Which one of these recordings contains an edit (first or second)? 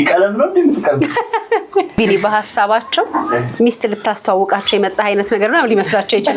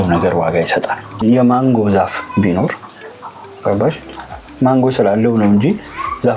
first